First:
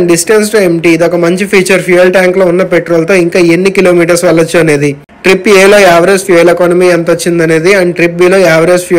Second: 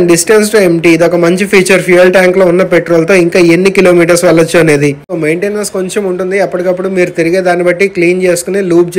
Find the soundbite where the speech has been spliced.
second; 1 cut; at 5.1 s

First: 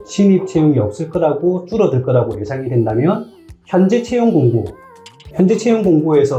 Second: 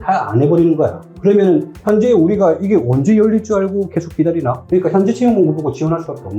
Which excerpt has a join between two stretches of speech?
second; 1 cut; at 1.1 s

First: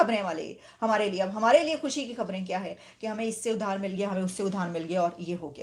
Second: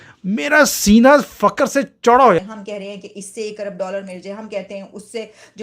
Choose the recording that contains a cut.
second; 1 cut; at 2.6 s

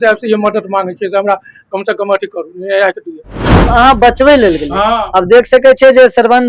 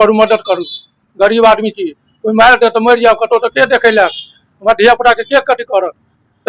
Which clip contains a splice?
first; 1 cut; at 3.7 s

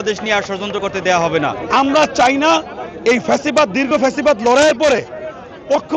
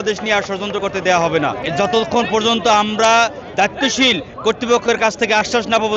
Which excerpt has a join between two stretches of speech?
first; 1 cut; at 1.6 s

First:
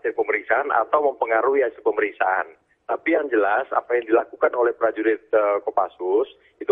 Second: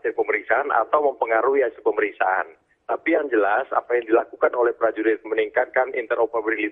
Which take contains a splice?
first; 1 cut; at 5.2 s

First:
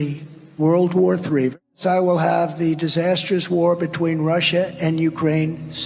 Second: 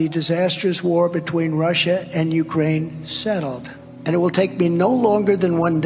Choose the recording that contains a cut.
first; 1 cut; at 1.5 s

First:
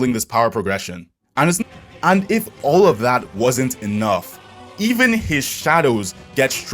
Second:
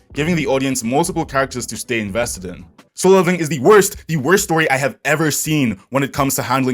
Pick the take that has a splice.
first; 1 cut; at 1.6 s

